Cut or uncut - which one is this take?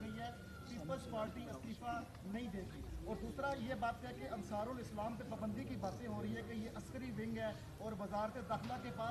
uncut